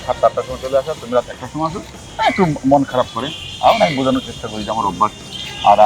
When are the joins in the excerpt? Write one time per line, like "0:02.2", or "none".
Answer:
none

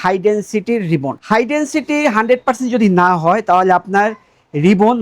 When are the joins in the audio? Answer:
none

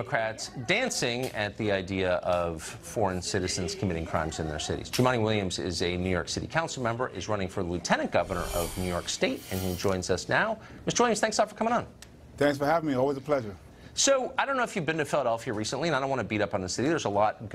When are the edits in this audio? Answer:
none

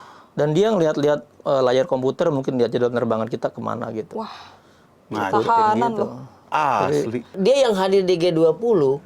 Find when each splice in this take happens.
0:07.4

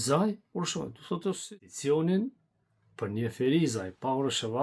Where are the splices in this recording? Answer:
0:01.5

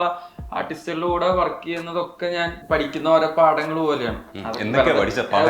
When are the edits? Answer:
0:02.6

